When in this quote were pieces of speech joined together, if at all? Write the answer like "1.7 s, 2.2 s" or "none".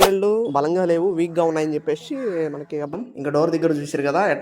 2.9 s